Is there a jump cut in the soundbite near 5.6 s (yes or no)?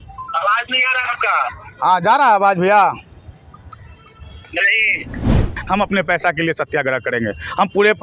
yes